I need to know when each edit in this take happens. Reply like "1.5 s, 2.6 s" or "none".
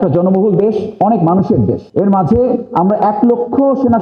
1.8 s